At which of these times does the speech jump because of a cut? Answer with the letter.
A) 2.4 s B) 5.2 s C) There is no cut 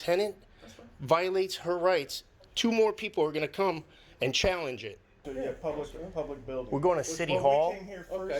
B